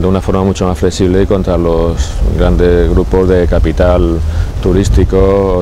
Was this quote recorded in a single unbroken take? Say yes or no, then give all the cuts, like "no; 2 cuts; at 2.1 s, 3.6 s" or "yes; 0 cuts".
yes; 0 cuts